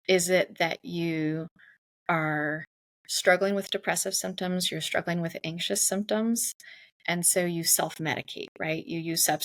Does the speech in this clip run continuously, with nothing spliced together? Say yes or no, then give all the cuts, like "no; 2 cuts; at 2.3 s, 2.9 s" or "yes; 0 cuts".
yes; 0 cuts